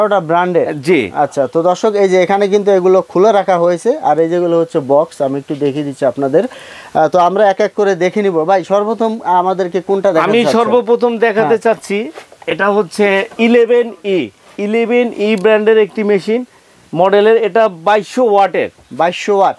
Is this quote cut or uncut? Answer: uncut